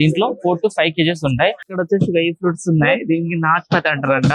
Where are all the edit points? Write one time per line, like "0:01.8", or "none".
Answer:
0:01.6